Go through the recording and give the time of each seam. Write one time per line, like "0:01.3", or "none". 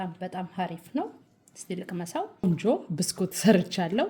0:02.4